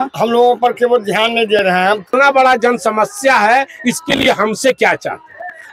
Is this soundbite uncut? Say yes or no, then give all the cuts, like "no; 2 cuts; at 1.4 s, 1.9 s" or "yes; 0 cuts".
no; 1 cut; at 2.1 s